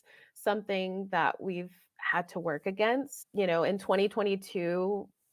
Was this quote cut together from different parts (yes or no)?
yes